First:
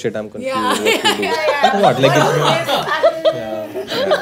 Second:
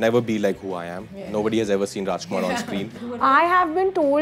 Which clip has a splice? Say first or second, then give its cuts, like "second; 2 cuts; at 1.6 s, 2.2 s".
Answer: second; 1 cut; at 3.1 s